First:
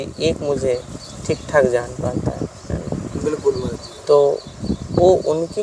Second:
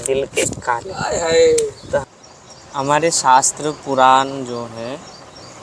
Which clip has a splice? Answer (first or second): second